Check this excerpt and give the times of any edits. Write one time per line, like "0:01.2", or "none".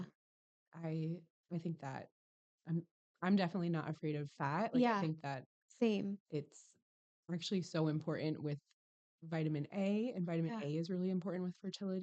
none